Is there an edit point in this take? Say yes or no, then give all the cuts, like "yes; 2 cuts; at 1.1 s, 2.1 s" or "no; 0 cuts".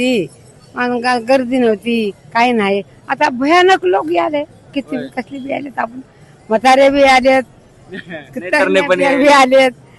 no; 0 cuts